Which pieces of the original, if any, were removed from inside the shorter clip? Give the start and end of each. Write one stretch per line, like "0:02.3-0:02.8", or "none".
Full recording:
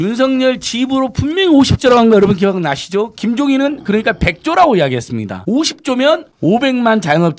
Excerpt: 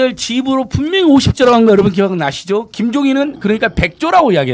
none